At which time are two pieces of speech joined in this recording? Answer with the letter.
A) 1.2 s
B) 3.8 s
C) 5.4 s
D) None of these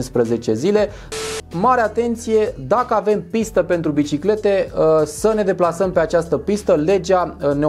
A